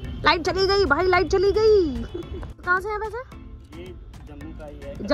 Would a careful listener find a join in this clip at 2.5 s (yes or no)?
yes